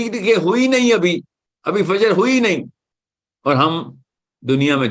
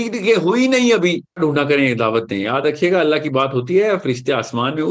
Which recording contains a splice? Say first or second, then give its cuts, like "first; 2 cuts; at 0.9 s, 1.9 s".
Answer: second; 1 cut; at 1.4 s